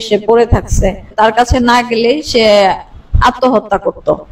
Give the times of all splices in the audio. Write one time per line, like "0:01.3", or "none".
0:01.1